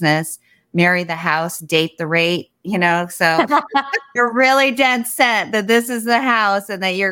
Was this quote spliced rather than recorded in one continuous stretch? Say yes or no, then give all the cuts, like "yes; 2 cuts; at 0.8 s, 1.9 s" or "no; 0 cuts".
yes; 1 cut; at 4.1 s